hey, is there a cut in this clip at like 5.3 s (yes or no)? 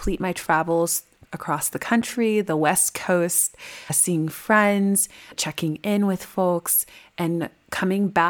yes